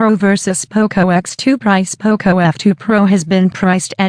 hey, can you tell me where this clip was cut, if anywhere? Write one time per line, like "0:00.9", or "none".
0:01.0